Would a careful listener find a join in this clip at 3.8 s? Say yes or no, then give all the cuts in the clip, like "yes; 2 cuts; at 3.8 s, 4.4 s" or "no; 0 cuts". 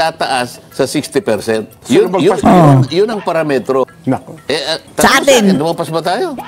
yes; 1 cut; at 3.8 s